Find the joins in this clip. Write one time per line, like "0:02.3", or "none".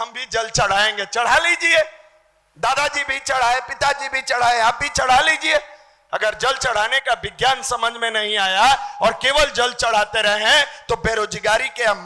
none